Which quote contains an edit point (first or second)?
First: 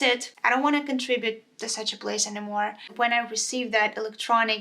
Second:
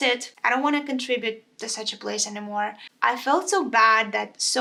first